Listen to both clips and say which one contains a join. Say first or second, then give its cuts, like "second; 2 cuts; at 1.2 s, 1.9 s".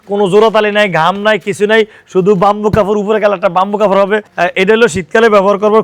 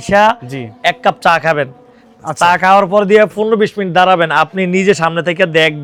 first; 1 cut; at 4.3 s